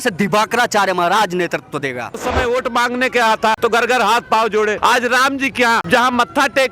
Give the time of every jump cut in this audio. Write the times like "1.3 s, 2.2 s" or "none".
2.2 s, 3.6 s, 4.8 s, 5.8 s

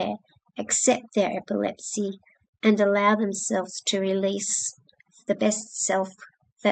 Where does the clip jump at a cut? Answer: none

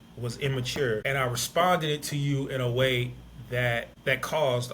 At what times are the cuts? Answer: 1.0 s, 3.9 s

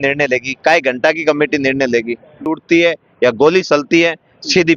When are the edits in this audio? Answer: 2.5 s

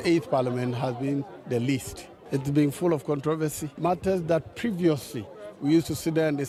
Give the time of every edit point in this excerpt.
none

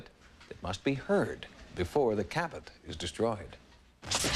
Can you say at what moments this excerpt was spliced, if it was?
1.1 s

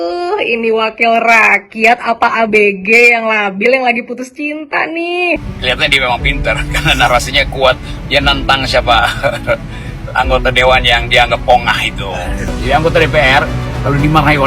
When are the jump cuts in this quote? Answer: 5.4 s, 12.5 s

